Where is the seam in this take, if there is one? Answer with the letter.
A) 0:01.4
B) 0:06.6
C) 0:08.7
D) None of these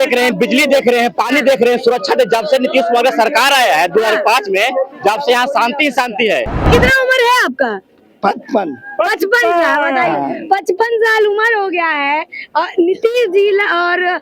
B